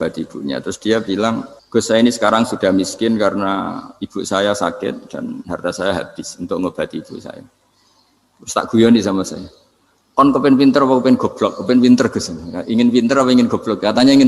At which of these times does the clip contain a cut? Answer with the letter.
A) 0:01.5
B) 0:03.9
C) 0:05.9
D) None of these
A